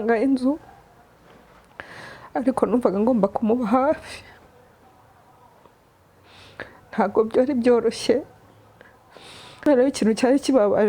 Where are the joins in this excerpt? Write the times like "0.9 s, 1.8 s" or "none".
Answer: 9.7 s